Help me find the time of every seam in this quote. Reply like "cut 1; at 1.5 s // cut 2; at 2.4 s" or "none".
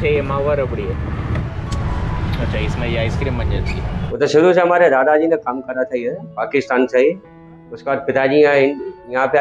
cut 1; at 1.4 s // cut 2; at 4.1 s